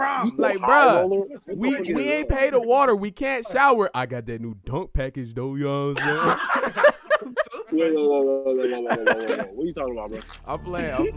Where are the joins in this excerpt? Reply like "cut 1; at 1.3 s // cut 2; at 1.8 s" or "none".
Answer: none